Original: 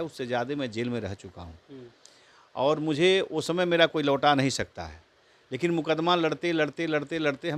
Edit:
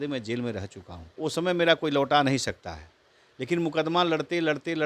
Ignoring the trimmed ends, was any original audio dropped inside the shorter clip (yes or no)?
yes